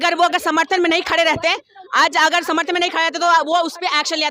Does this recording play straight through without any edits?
yes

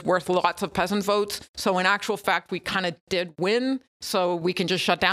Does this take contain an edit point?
no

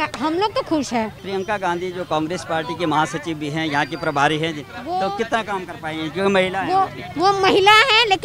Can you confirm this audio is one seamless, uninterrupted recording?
no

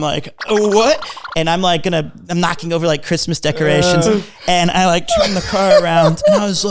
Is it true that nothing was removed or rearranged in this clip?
yes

